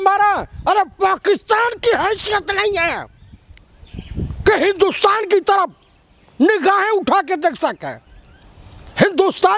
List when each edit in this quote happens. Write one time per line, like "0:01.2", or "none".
none